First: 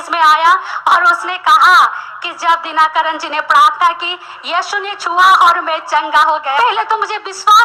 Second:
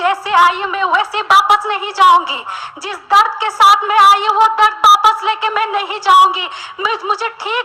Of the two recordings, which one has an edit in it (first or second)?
first